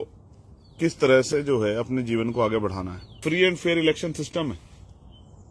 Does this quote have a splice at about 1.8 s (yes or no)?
no